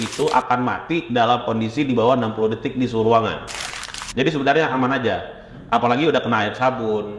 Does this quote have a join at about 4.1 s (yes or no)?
no